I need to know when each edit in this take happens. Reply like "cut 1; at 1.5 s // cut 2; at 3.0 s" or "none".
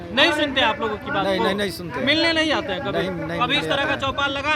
none